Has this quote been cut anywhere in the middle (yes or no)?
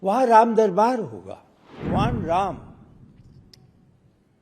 yes